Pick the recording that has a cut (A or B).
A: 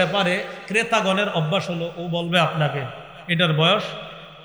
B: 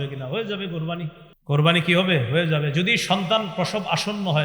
B